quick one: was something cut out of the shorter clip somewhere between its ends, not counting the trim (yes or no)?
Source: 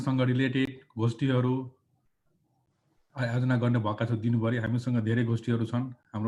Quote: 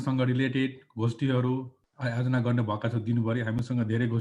yes